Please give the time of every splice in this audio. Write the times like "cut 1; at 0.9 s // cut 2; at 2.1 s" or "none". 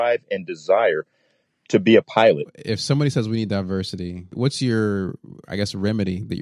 cut 1; at 4.3 s